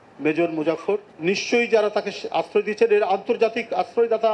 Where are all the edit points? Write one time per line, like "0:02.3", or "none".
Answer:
0:01.1